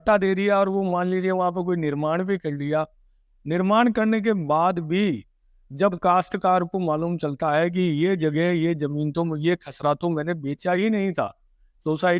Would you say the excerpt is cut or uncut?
uncut